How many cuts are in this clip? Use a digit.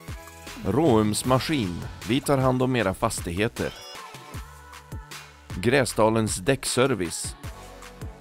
1